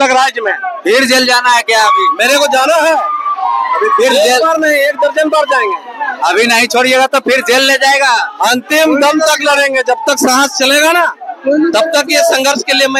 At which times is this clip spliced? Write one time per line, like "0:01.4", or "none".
none